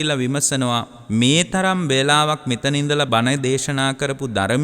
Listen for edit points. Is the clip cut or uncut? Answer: cut